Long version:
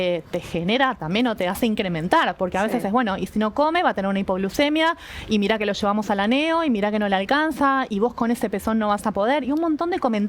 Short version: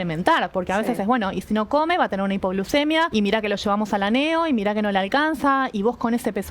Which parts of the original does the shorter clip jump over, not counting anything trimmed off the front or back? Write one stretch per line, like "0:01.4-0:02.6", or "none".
0:04.9-0:05.3